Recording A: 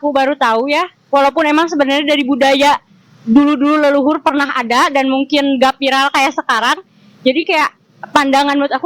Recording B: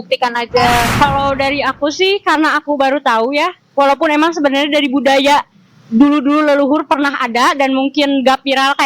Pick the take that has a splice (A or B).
B